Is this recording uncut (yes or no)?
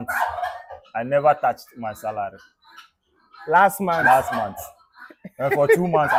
yes